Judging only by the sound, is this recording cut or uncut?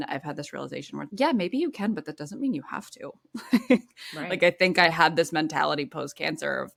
uncut